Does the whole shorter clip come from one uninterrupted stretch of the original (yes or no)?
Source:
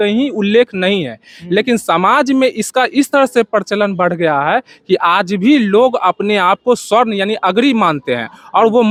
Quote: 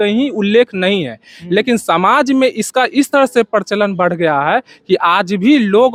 yes